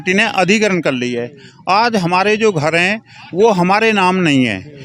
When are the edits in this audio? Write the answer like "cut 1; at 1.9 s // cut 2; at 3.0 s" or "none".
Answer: none